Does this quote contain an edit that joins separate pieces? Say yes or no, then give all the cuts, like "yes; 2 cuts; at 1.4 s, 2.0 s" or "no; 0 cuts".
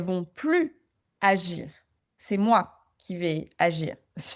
no; 0 cuts